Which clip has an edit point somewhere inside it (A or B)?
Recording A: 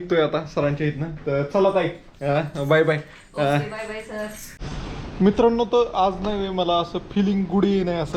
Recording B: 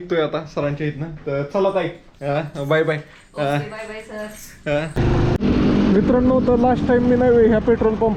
A